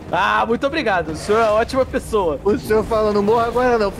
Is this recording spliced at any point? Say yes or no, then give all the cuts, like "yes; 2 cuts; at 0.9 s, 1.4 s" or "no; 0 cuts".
yes; 1 cut; at 2.4 s